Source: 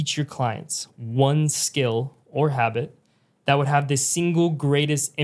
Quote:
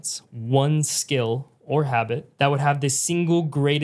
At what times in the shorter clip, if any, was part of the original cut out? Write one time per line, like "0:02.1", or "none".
0:02.3

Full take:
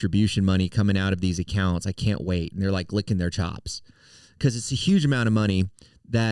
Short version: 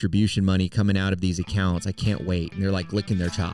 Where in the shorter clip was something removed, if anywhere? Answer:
none

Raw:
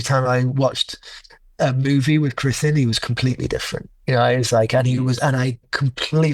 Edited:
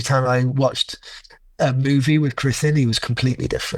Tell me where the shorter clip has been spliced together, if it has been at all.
none

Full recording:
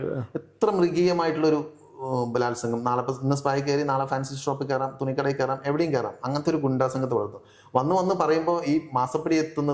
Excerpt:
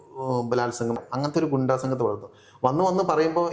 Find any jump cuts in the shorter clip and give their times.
0:01.0

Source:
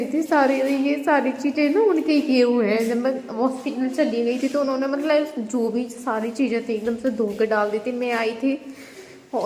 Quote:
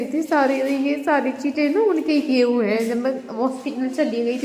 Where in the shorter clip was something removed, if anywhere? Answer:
none

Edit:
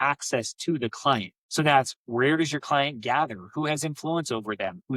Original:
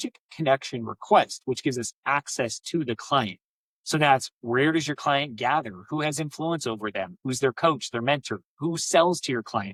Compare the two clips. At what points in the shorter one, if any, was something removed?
0:01.4

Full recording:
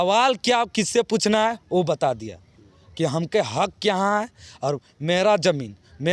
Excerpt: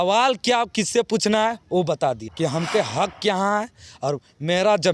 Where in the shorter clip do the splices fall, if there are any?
0:02.3

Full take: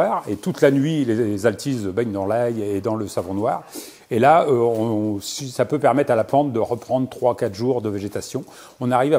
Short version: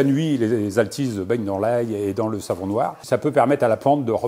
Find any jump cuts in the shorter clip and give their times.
0:03.0

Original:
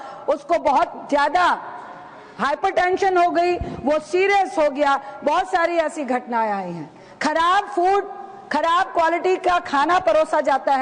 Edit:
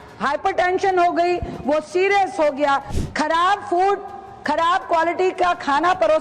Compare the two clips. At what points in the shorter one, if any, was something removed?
0:02.9

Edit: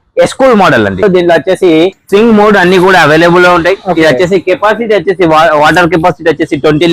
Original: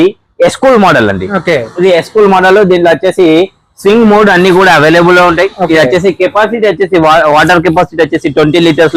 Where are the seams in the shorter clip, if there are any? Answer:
0:01.0
0:02.0

